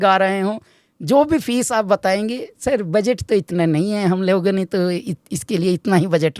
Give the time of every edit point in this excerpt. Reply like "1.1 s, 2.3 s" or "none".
none